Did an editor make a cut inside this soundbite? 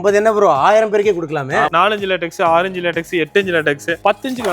yes; 1 cut; at 1.7 s

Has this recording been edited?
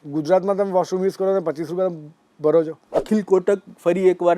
yes; 1 cut; at 2.8 s

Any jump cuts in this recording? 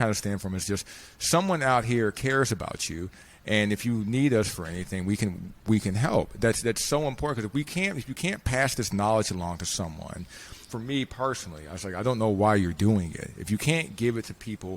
yes; 1 cut; at 10.7 s

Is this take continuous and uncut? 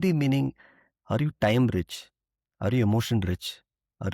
yes; 0 cuts

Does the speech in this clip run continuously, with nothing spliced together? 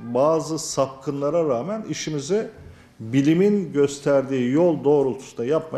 yes; 0 cuts

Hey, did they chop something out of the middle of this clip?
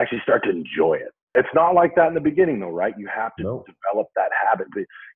yes; 1 cut; at 1.3 s

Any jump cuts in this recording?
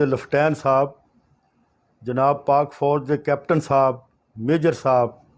no; 0 cuts

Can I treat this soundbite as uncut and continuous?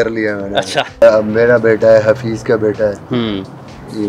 no; 1 cut; at 1.0 s

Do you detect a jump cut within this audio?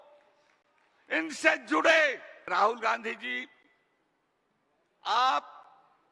yes; 1 cut; at 2.3 s

